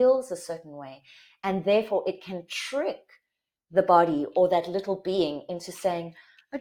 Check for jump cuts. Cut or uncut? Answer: uncut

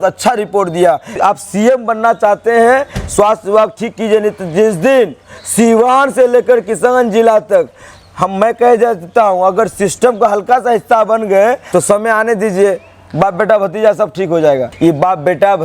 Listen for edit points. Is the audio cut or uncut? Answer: cut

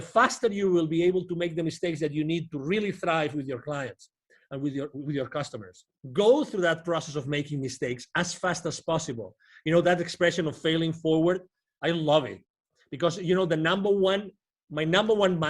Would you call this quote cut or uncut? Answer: cut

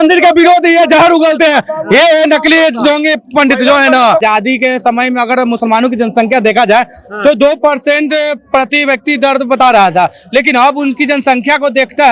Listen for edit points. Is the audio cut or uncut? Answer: cut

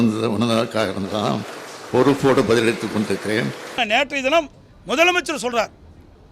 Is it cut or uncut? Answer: cut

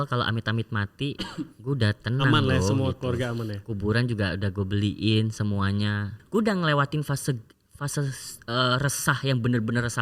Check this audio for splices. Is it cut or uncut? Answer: cut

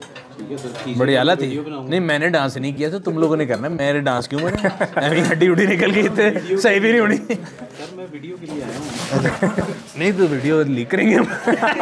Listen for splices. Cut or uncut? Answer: uncut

